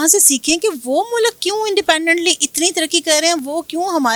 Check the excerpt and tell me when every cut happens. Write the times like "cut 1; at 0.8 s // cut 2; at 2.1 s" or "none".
none